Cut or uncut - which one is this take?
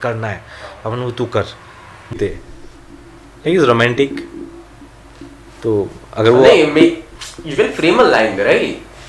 cut